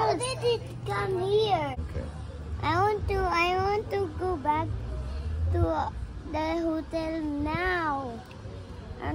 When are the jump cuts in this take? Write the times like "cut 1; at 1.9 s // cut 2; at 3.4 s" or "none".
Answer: cut 1; at 1.8 s